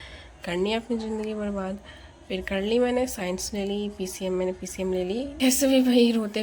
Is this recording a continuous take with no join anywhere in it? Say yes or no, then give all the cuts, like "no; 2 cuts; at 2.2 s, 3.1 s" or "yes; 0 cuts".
no; 1 cut; at 5.3 s